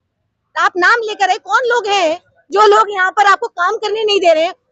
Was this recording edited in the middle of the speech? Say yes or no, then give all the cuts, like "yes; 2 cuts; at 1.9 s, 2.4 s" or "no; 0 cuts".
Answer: no; 0 cuts